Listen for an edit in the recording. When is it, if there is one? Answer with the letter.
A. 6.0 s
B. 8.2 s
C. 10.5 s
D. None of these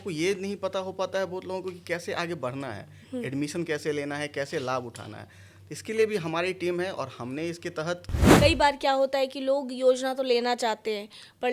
B